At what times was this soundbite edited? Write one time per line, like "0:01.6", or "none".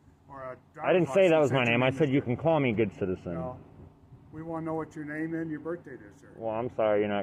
none